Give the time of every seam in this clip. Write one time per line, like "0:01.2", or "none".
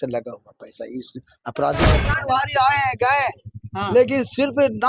0:02.0